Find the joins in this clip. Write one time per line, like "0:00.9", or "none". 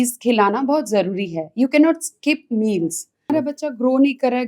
0:03.3